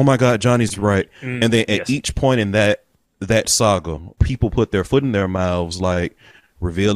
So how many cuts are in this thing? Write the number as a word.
two